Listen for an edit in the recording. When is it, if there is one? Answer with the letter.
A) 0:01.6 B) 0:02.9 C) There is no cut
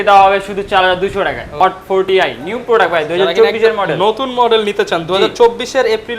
A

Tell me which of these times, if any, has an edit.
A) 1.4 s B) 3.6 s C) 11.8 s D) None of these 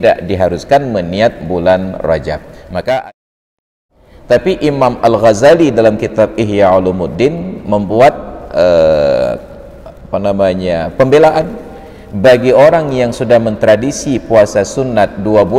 B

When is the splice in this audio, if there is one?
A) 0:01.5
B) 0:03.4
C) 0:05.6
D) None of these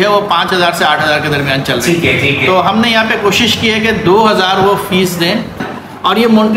C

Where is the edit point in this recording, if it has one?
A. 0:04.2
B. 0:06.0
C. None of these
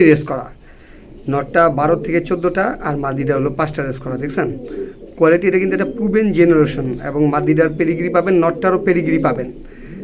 C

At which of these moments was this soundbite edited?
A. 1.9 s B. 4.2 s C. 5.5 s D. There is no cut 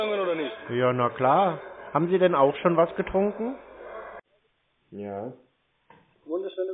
B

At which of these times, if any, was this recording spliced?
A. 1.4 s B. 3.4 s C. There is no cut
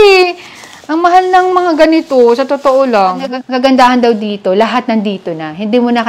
B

